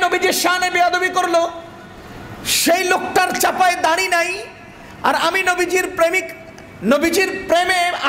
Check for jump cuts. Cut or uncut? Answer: uncut